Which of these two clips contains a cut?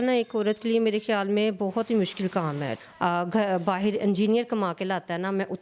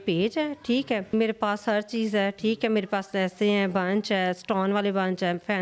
first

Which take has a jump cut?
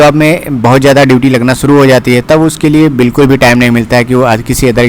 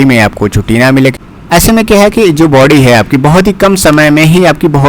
second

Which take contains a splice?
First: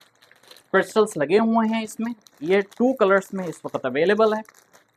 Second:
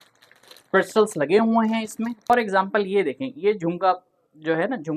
second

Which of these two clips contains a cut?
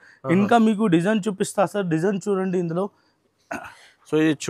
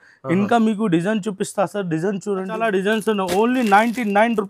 second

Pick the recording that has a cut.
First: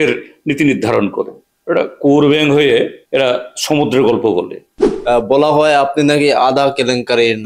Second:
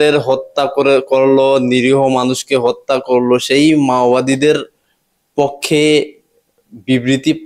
first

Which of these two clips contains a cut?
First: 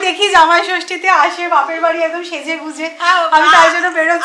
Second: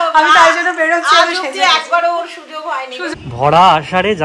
second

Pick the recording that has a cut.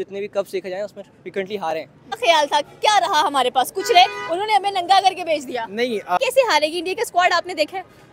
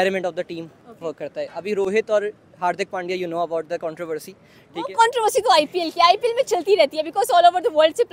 first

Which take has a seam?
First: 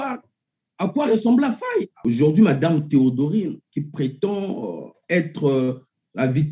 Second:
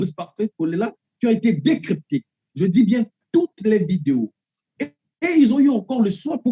first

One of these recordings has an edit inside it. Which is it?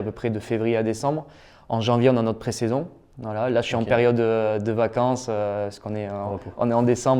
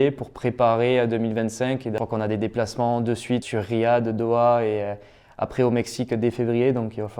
second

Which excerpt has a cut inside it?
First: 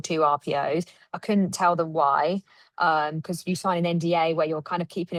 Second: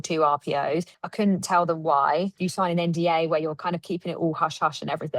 second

